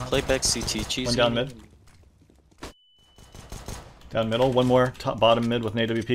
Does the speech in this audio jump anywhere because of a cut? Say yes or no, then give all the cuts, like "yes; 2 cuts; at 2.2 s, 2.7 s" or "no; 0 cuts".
no; 0 cuts